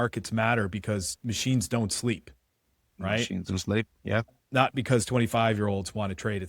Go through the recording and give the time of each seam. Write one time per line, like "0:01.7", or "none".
0:04.3